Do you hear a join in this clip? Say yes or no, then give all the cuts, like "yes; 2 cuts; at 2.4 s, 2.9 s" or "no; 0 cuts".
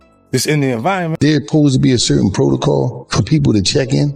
yes; 1 cut; at 1.6 s